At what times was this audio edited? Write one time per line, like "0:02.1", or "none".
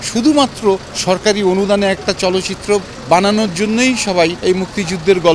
0:00.9
0:02.9
0:04.4